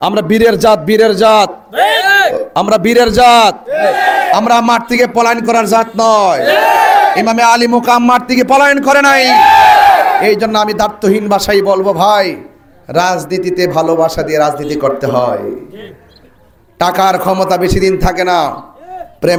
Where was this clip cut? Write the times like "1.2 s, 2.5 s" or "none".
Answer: none